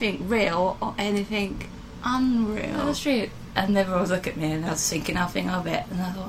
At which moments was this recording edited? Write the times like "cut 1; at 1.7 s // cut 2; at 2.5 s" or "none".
cut 1; at 2.9 s